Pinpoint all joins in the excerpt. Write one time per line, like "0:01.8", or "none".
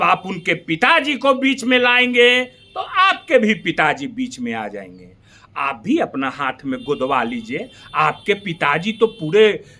none